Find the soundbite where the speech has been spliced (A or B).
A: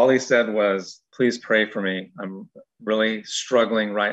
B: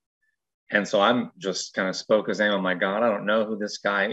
A